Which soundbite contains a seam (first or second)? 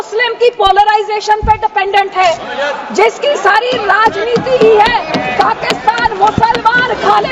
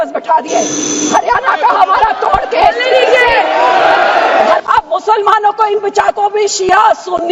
second